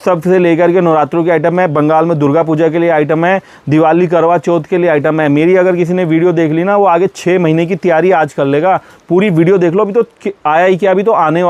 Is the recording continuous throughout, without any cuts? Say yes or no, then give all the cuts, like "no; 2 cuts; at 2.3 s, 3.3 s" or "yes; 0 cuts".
yes; 0 cuts